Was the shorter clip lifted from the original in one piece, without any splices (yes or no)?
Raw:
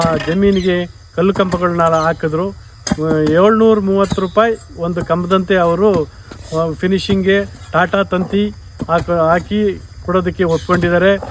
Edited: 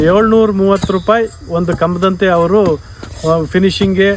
yes